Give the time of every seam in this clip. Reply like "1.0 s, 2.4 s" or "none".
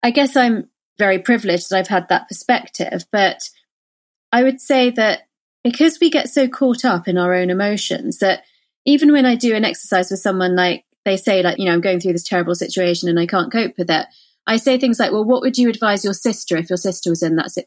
1.0 s, 11.5 s